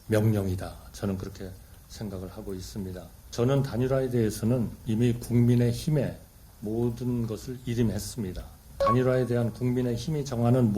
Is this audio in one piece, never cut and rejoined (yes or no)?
no